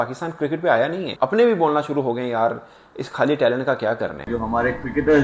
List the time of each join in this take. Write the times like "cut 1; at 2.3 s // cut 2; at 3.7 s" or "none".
cut 1; at 4.3 s